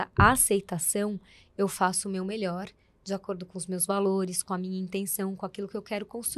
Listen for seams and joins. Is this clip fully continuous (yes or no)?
yes